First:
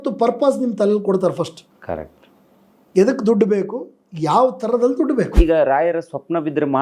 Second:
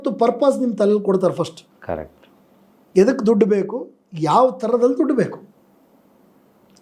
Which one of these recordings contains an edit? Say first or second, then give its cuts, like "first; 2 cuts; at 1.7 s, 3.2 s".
first; 1 cut; at 5.3 s